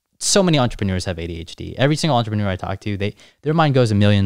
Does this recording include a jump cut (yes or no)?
no